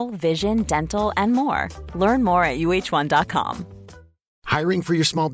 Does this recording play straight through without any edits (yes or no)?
yes